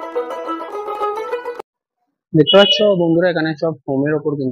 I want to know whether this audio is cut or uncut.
cut